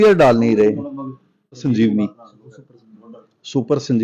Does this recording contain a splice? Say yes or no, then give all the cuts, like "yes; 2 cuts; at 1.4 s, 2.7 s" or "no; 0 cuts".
yes; 1 cut; at 1.6 s